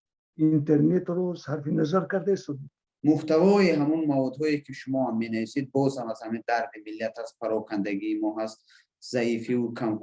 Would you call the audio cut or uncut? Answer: cut